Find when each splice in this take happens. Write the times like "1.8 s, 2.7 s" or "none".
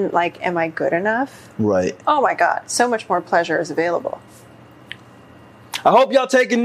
2.0 s, 4.3 s